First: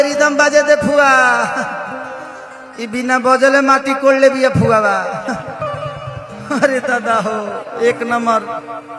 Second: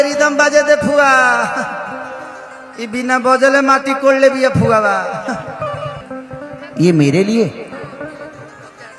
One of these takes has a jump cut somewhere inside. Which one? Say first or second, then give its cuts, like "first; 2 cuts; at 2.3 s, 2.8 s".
second; 1 cut; at 6.0 s